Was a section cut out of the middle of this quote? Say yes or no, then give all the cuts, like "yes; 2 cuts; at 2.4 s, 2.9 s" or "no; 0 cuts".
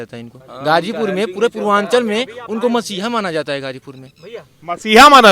no; 0 cuts